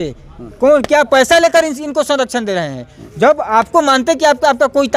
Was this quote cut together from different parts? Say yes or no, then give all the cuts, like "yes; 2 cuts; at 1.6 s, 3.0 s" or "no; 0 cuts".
no; 0 cuts